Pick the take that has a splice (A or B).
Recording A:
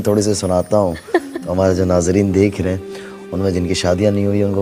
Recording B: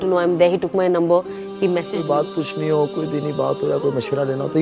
B